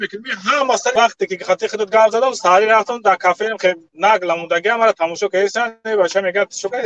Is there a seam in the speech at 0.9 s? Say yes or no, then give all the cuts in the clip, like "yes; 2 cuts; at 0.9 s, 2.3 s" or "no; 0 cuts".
yes; 1 cut; at 0.9 s